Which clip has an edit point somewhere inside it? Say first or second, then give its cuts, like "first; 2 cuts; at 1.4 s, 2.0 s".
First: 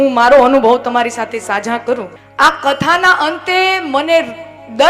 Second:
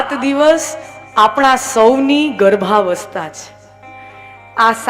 first; 1 cut; at 2.2 s